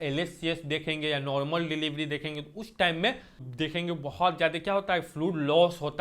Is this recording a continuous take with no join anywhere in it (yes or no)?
no